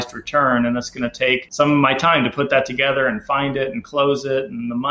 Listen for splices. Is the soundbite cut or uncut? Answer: cut